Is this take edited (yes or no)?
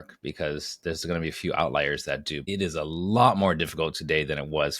yes